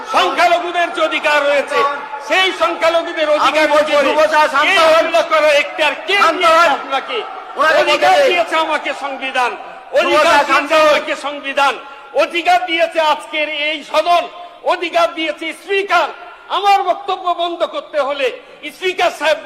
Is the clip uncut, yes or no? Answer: yes